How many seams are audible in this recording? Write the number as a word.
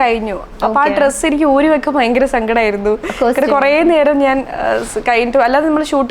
zero